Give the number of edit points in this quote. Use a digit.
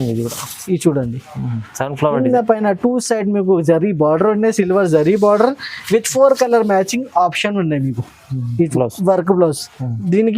1